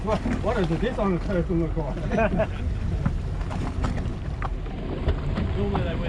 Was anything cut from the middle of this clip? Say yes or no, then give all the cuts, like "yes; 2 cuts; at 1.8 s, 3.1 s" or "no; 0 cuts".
no; 0 cuts